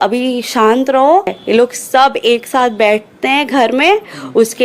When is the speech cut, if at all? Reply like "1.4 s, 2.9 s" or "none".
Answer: 1.3 s

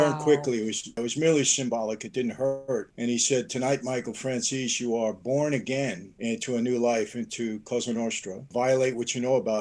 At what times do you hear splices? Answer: 1.0 s, 2.9 s, 6.1 s, 8.5 s

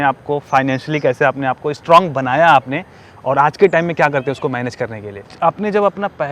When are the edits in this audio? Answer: 5.3 s

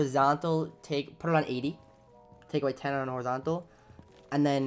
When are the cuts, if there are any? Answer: none

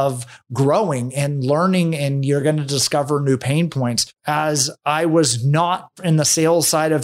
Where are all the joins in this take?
5.9 s

